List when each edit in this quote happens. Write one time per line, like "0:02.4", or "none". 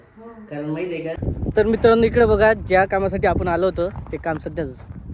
0:01.2